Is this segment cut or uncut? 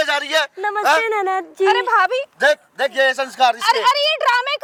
uncut